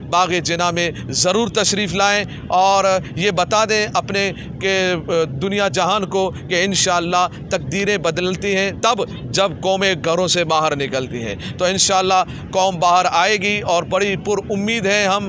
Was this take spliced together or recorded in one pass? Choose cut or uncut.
uncut